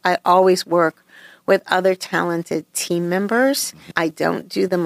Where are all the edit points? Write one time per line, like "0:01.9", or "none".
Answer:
none